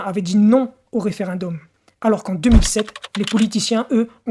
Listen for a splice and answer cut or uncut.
uncut